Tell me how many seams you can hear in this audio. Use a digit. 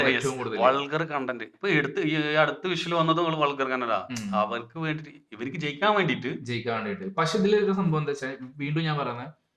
0